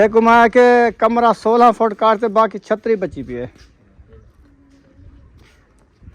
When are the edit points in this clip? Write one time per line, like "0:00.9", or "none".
0:04.3